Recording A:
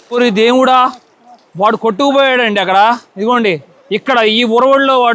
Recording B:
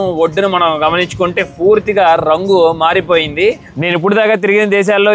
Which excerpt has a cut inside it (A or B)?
B